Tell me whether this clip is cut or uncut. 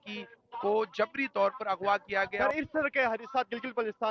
cut